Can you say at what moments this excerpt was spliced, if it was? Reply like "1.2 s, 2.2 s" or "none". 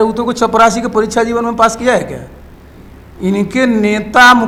none